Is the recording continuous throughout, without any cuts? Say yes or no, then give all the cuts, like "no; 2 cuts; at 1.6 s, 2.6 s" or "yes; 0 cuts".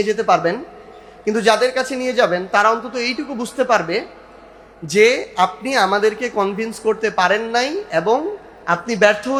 yes; 0 cuts